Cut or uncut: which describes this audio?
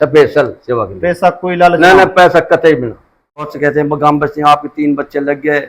cut